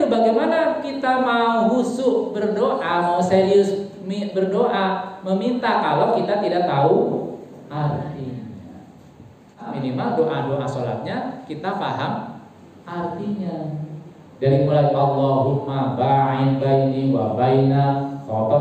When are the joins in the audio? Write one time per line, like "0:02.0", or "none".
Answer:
0:09.7